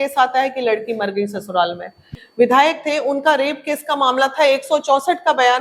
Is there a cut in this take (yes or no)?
yes